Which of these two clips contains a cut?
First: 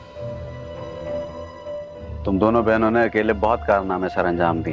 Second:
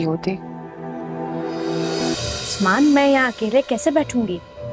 second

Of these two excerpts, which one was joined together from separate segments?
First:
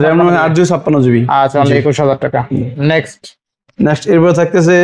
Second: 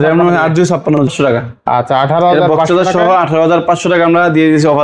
second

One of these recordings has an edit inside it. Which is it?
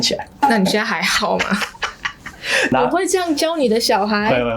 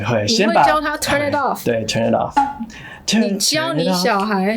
first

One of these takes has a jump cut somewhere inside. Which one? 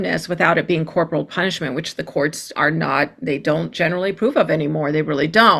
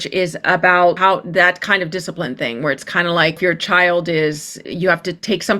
second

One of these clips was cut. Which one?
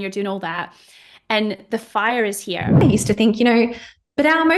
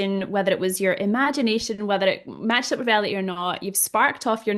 first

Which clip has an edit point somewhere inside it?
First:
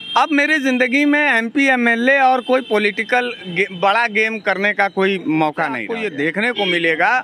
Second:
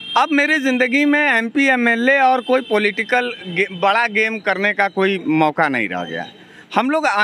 first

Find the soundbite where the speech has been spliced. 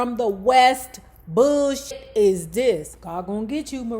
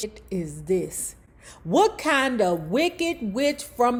first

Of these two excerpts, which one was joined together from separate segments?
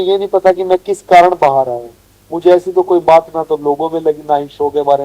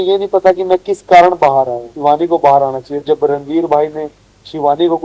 second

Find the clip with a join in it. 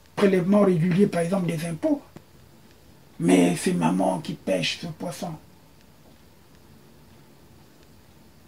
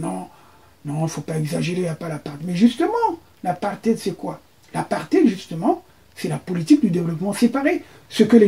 first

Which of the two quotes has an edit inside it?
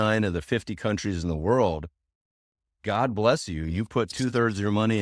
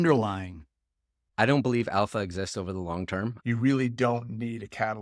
second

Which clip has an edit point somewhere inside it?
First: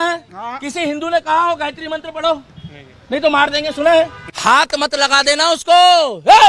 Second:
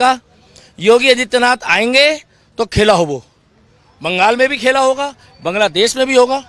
first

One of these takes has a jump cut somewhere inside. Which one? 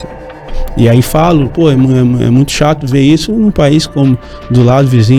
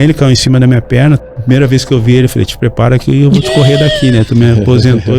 second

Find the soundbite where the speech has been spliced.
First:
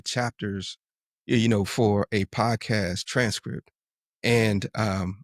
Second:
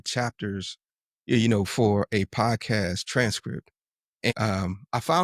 second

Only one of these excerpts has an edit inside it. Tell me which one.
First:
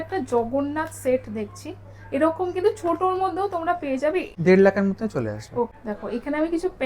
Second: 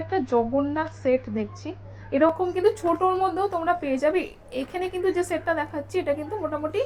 first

